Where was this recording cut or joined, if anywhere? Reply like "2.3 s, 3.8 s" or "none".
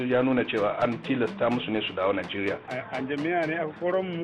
2.7 s

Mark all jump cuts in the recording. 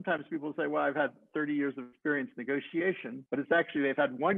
none

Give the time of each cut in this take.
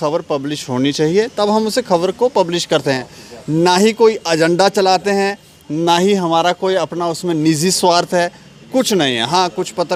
none

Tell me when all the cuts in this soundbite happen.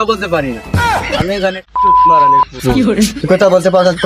1.6 s

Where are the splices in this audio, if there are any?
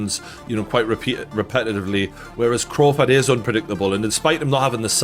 none

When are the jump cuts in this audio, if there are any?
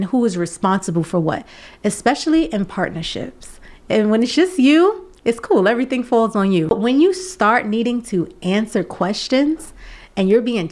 6.7 s

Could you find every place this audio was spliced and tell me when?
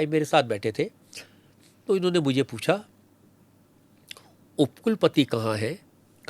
none

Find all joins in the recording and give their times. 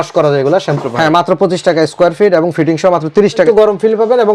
0.8 s, 3.4 s

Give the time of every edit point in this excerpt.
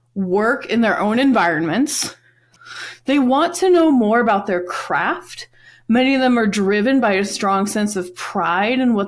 2.5 s

